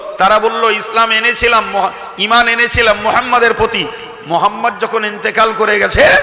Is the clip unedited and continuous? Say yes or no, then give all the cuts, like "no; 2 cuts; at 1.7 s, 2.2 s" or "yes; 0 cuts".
yes; 0 cuts